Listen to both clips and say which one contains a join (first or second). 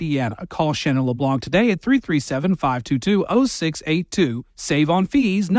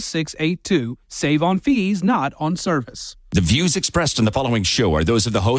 second